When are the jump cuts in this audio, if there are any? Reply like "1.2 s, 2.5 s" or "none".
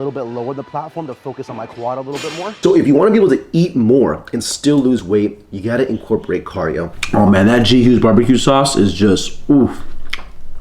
2.5 s, 6.9 s